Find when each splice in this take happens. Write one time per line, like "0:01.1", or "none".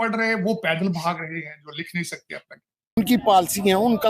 0:03.0

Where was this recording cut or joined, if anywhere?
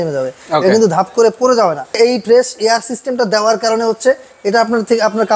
0:02.0

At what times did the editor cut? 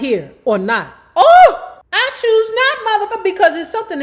0:01.7
0:03.1

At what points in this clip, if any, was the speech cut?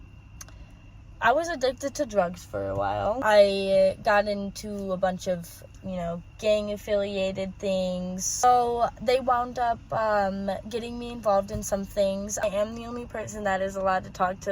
0:03.2
0:08.4
0:12.4

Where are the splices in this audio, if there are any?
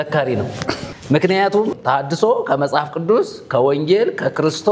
0:00.9
0:01.7

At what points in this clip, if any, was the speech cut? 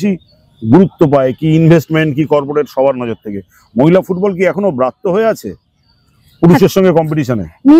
none

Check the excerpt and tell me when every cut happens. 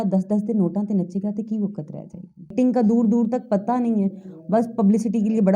0:02.5

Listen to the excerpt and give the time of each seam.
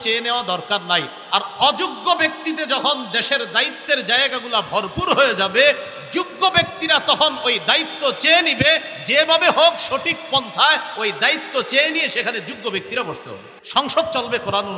0:13.5

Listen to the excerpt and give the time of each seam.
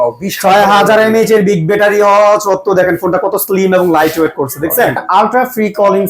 0:05.0

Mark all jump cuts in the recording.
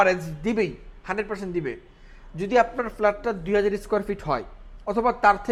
none

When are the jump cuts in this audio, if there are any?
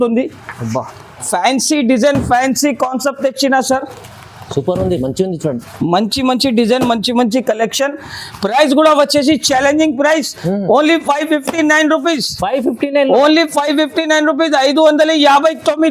none

